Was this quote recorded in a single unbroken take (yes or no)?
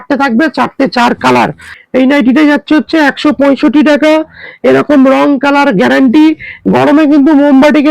no